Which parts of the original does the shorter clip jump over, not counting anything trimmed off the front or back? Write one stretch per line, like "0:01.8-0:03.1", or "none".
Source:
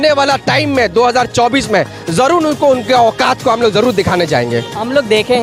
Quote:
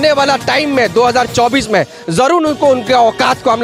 none